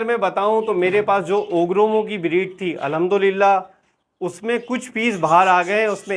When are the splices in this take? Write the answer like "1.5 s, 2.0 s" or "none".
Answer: none